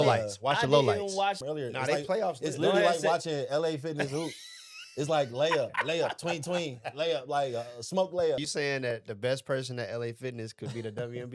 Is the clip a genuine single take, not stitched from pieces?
no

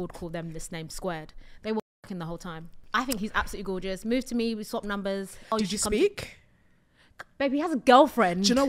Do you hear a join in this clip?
yes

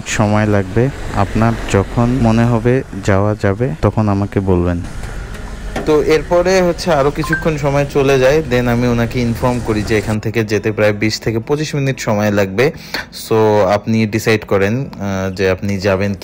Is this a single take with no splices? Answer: no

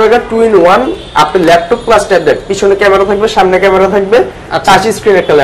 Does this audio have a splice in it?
no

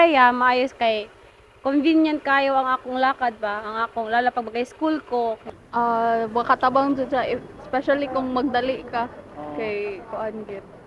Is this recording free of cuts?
no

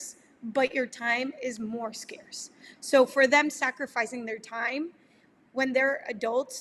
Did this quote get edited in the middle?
no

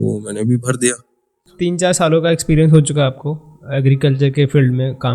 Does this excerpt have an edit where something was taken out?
yes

